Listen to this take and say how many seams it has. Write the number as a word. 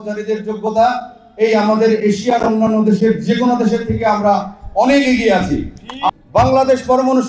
one